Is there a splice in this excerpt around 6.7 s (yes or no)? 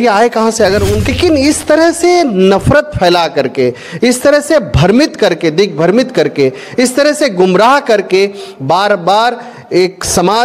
no